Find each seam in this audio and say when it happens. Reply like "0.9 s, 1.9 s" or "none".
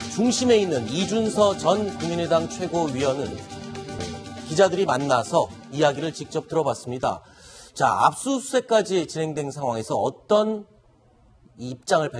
none